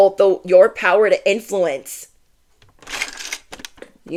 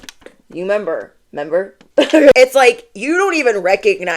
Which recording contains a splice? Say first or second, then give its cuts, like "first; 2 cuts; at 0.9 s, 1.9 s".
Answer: second; 1 cut; at 2.3 s